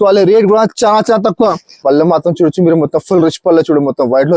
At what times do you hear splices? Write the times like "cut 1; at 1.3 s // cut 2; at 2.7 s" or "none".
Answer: cut 1; at 1.8 s